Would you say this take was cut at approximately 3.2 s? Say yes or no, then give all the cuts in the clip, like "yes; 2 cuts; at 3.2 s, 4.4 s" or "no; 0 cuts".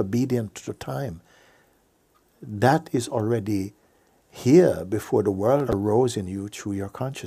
no; 1 cut; at 5.7 s